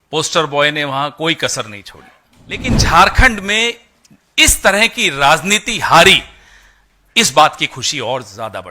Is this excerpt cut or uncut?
cut